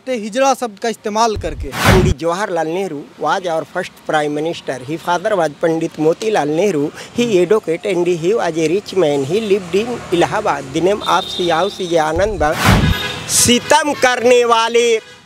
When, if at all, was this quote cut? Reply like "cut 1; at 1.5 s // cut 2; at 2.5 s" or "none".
cut 1; at 1.9 s // cut 2; at 12.7 s